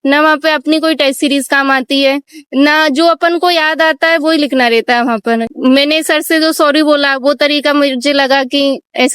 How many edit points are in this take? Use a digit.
1